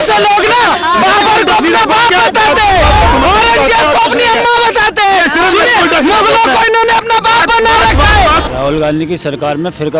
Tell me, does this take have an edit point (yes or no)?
yes